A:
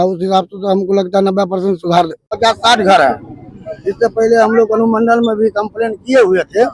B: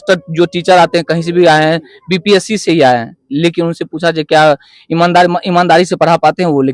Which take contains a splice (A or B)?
A